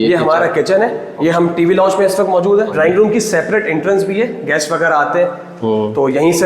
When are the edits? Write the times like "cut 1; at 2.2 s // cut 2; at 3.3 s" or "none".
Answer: cut 1; at 1.1 s // cut 2; at 2.7 s